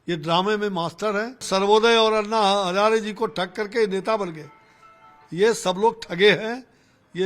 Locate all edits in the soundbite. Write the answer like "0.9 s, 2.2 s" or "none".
1.4 s